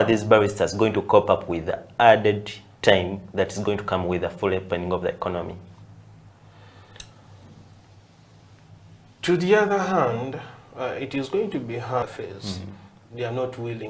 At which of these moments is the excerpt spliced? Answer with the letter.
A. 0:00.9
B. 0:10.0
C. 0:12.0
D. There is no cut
C